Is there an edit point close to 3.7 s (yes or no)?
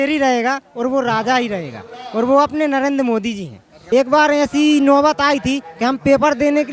yes